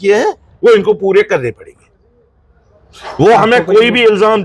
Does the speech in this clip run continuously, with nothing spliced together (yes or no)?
yes